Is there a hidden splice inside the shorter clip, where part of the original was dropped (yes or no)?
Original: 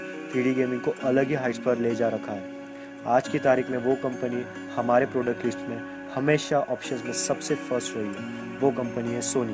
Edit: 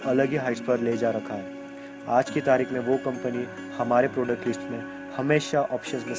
no